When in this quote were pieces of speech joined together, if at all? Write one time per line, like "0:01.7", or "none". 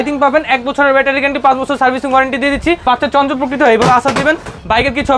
0:02.8